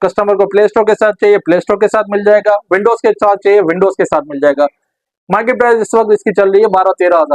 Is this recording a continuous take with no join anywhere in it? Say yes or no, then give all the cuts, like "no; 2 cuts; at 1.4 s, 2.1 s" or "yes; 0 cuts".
yes; 0 cuts